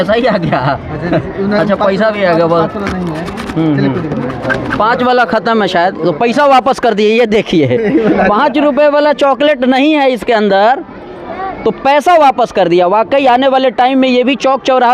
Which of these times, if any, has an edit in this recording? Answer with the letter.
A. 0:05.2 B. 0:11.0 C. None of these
C